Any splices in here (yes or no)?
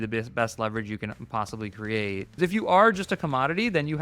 yes